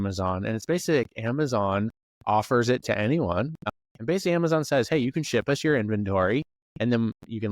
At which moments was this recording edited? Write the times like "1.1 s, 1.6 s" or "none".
3.6 s